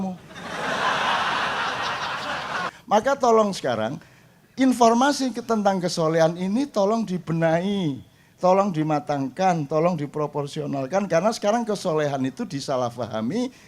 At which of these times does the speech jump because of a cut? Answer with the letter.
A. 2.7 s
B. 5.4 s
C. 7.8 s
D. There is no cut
A